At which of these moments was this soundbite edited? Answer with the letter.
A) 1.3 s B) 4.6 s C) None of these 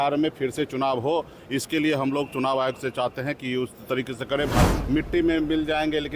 B